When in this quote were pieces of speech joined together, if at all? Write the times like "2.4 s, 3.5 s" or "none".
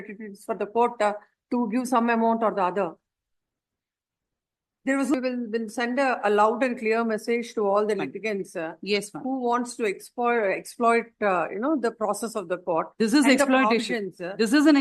5.1 s